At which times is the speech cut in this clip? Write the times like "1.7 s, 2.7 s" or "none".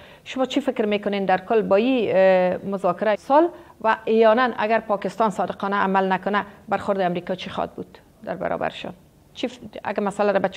3.2 s

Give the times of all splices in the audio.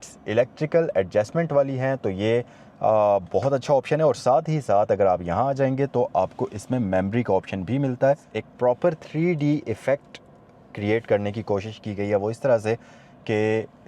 8.2 s

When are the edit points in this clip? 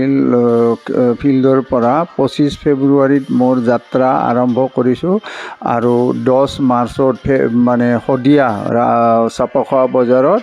none

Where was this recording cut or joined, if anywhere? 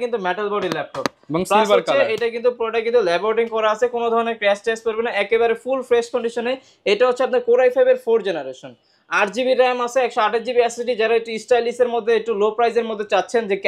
none

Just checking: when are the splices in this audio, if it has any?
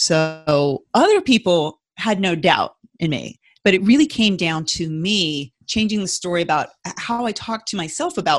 none

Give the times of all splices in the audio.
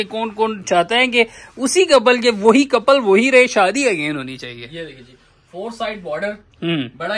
none

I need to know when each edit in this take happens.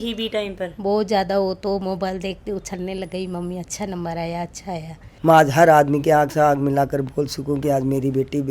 5.1 s

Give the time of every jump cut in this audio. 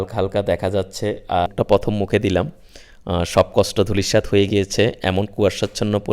1.5 s

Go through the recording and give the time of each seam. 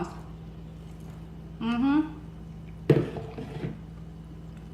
none

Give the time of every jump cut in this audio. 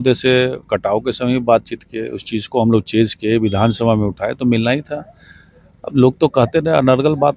none

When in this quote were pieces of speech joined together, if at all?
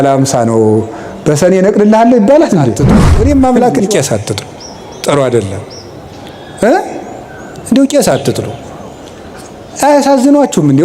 3.2 s

